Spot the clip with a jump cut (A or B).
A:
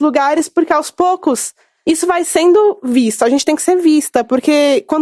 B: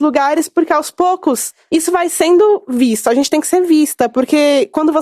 B